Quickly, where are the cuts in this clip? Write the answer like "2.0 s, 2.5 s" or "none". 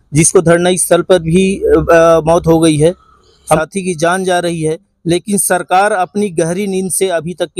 3.6 s